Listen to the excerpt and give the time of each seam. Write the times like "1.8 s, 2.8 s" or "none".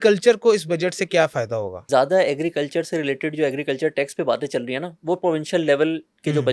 1.8 s